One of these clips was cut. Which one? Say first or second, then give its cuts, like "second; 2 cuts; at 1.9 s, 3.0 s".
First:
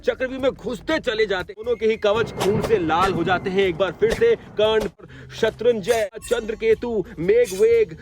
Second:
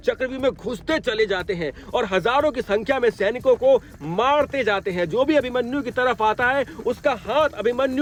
first; 3 cuts; at 1.7 s, 5.1 s, 6.2 s